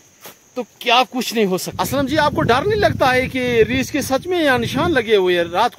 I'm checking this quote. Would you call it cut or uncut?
cut